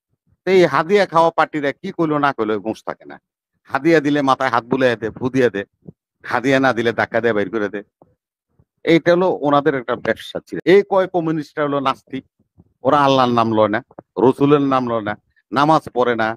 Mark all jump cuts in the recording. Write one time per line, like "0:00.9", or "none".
0:10.5